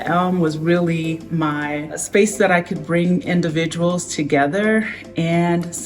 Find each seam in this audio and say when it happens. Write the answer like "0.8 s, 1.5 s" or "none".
1.9 s

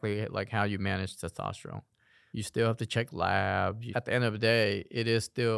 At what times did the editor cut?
3.8 s

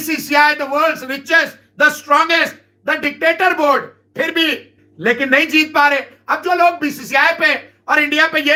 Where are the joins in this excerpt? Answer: none

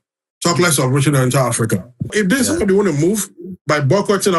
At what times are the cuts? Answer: 2.1 s

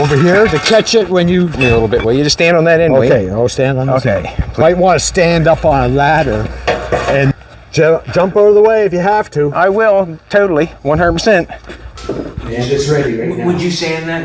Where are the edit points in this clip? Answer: 1.6 s, 4.5 s, 7.3 s, 12.4 s

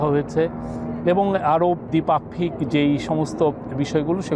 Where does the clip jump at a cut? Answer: 1.9 s

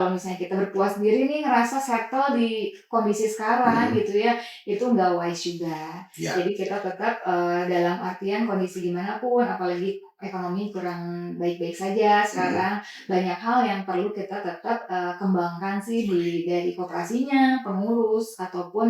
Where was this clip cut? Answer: none

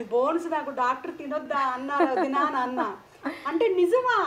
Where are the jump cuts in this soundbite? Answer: 1.4 s

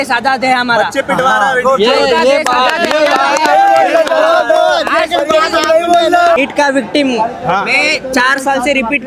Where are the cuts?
none

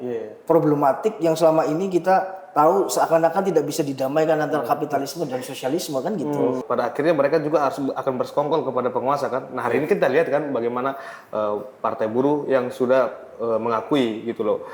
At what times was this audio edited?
6.6 s

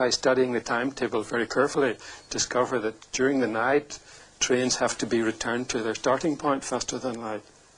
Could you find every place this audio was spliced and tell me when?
3.5 s

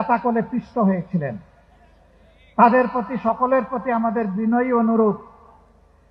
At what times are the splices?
none

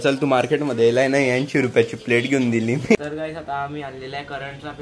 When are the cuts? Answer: 3.0 s

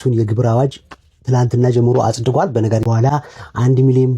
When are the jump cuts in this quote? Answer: 2.9 s

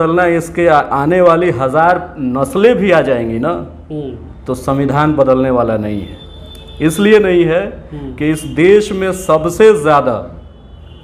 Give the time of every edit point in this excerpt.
none

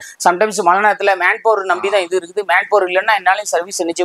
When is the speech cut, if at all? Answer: none

